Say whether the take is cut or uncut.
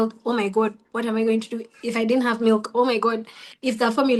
uncut